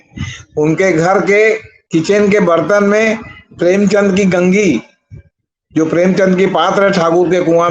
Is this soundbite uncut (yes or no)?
yes